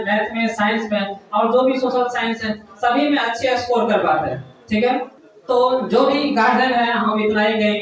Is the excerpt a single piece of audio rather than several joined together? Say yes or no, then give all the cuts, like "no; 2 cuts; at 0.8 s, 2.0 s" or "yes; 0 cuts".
yes; 0 cuts